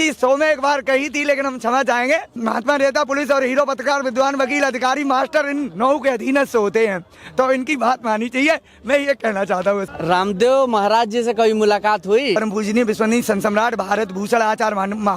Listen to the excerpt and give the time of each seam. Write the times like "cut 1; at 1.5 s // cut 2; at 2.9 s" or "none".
cut 1; at 2.4 s // cut 2; at 9.9 s // cut 3; at 12.4 s